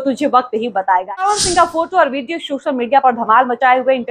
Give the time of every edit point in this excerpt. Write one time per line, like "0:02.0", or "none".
0:01.3